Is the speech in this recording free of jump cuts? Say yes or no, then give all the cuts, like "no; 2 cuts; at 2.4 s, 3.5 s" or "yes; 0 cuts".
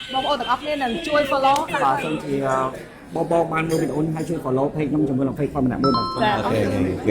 no; 1 cut; at 1.7 s